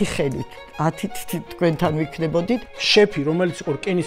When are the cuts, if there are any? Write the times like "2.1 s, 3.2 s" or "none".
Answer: 2.7 s